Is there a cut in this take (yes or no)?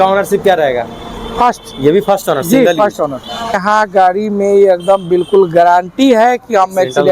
yes